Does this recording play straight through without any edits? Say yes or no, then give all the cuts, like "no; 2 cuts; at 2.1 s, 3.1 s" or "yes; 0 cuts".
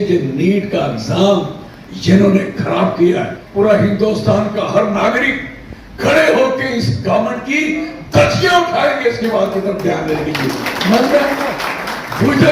no; 1 cut; at 3.4 s